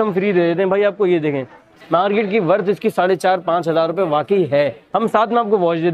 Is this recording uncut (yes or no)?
no